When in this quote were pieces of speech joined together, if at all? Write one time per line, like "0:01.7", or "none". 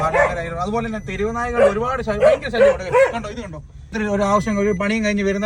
0:03.9